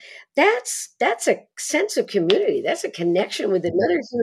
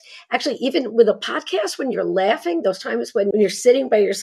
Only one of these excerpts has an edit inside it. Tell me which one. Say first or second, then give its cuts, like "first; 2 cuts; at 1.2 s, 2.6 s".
second; 1 cut; at 3.3 s